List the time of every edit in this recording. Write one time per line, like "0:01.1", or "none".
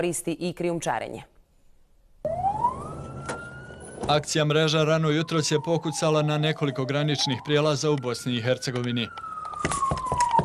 none